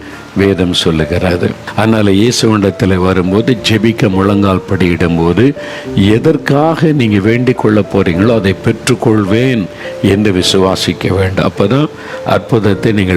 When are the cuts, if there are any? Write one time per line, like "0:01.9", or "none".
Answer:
0:01.6

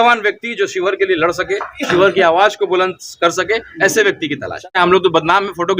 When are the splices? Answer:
0:04.5

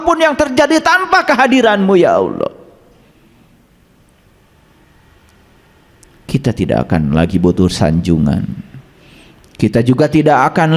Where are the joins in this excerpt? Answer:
none

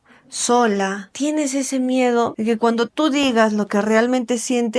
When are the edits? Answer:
0:01.0
0:02.4

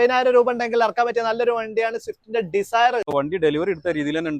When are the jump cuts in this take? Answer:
0:03.1

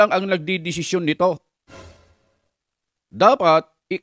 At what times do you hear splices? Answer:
none

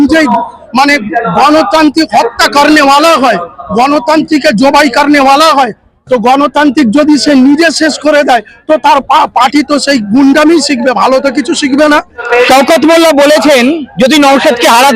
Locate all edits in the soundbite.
0:12.2

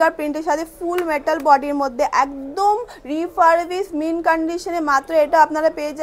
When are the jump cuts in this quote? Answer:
none

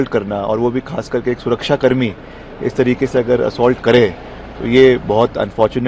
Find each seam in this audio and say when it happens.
none

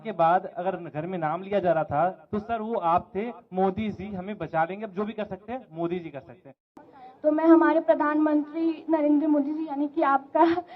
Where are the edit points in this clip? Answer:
0:06.9

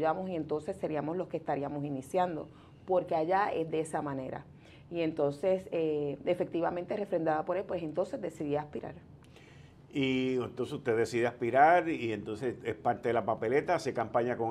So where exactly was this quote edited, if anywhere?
none

